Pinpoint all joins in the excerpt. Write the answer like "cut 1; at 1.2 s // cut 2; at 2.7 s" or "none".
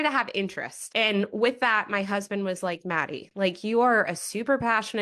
none